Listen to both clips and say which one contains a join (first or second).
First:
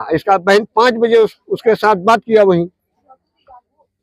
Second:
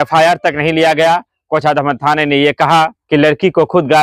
second